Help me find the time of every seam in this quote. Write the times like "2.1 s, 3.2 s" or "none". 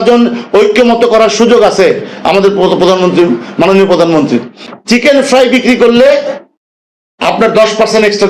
4.6 s